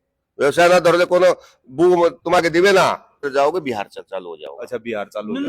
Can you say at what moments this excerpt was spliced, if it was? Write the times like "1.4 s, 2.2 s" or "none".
3.2 s